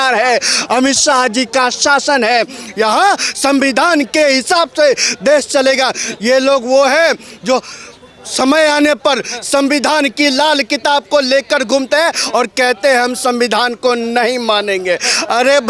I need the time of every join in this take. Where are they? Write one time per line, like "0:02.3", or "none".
none